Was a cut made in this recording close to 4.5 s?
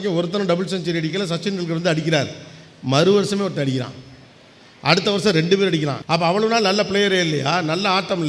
no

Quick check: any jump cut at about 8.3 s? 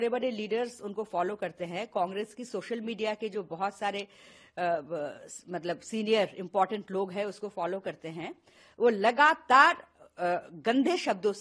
no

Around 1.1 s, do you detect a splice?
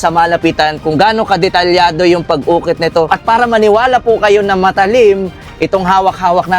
no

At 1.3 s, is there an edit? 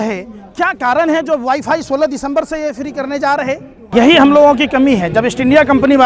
no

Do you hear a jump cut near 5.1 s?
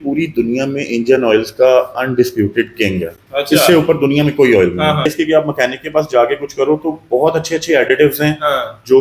yes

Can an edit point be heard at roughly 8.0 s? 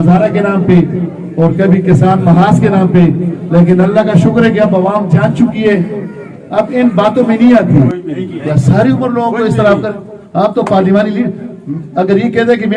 yes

